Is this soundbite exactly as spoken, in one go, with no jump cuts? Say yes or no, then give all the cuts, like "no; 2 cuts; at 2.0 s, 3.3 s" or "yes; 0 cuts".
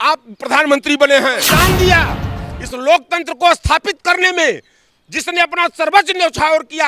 no; 1 cut; at 1.4 s